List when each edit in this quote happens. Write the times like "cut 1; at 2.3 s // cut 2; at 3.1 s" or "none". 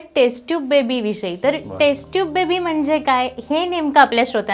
none